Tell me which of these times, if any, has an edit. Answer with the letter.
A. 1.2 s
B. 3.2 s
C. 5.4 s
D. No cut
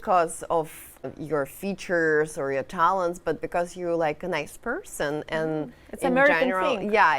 A